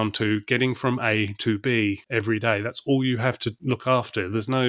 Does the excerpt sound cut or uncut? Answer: uncut